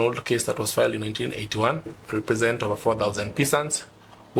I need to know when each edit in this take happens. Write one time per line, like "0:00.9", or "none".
0:02.0